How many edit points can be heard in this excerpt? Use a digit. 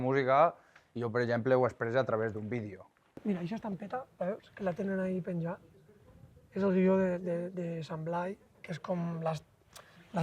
1